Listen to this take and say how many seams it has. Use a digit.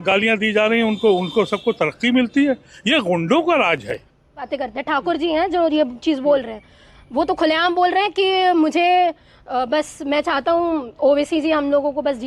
1